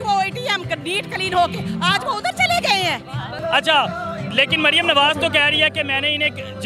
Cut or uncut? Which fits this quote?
uncut